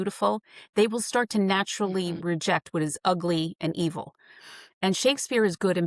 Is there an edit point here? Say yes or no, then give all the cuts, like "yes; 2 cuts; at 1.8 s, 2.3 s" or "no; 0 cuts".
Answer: no; 0 cuts